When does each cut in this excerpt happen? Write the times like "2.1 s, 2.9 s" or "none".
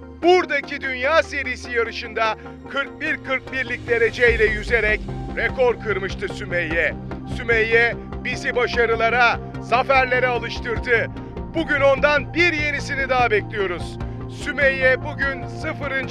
13.9 s